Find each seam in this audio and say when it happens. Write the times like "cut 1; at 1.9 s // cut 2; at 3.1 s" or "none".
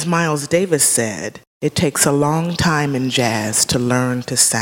cut 1; at 1.4 s